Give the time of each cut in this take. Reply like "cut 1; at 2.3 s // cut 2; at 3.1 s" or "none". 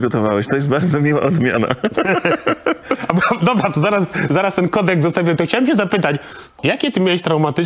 cut 1; at 6.6 s

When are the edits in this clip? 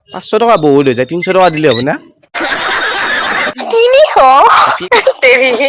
cut 1; at 3.4 s // cut 2; at 4.8 s

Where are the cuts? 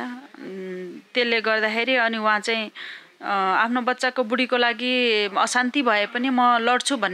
none

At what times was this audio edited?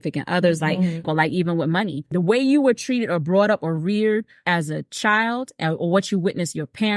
cut 1; at 1.0 s // cut 2; at 2.0 s // cut 3; at 4.3 s

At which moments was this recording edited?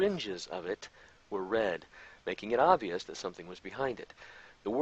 cut 1; at 3.6 s

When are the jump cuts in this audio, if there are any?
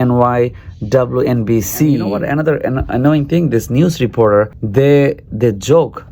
cut 1; at 2.2 s

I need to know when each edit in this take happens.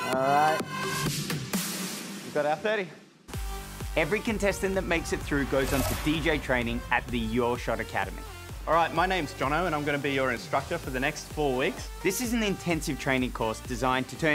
none

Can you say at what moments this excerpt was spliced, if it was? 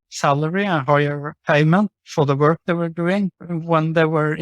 cut 1; at 1.3 s // cut 2; at 2.0 s // cut 3; at 3.5 s

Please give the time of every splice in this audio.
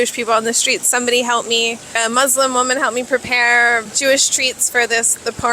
cut 1; at 1.9 s // cut 2; at 3.9 s

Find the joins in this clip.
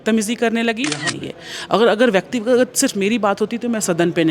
cut 1; at 1.1 s

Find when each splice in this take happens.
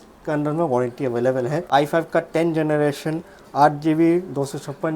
cut 1; at 1.6 s

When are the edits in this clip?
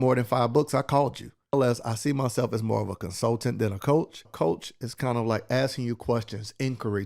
cut 1; at 1.5 s // cut 2; at 4.2 s

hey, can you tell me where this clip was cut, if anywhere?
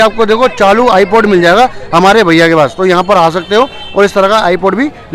none

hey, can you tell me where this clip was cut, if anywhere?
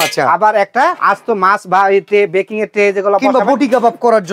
cut 1; at 1.0 s

